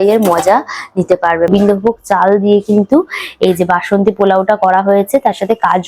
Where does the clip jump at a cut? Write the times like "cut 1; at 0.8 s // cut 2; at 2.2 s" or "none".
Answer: cut 1; at 1.5 s